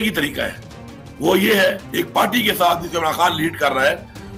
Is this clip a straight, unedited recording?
no; 1 cut; at 1.8 s

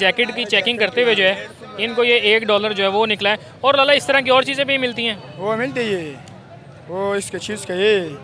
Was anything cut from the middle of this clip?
no; 0 cuts

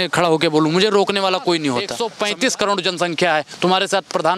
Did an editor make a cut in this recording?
yes; 1 cut; at 2.0 s

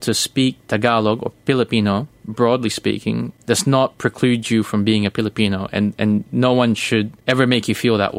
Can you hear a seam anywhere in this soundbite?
yes; 2 cuts; at 3.3 s, 7.2 s

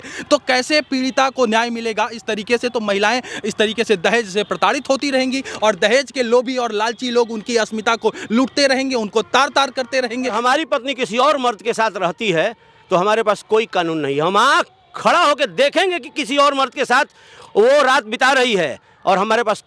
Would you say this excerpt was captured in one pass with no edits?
no; 1 cut; at 10.4 s

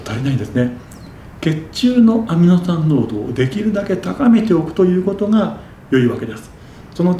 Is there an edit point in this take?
no; 0 cuts

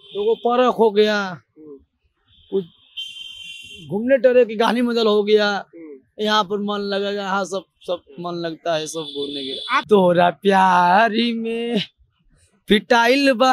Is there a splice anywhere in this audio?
yes; 1 cut; at 9.8 s

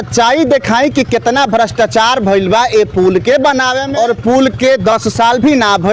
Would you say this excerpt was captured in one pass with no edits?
no; 1 cut; at 3.8 s

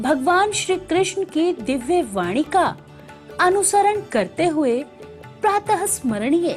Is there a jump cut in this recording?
no; 0 cuts

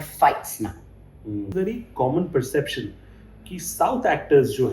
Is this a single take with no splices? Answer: no; 1 cut; at 1.5 s

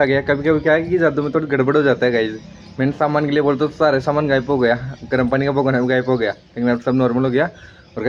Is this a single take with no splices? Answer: yes; 0 cuts

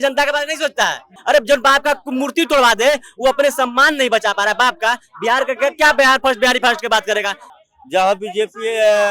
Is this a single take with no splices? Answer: no; 2 cuts; at 1.1 s, 7.4 s

